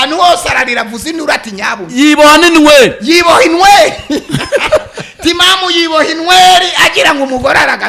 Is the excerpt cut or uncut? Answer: uncut